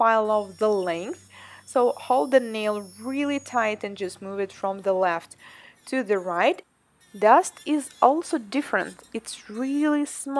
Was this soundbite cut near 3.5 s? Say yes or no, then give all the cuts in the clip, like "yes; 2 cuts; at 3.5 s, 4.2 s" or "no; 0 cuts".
yes; 1 cut; at 3.5 s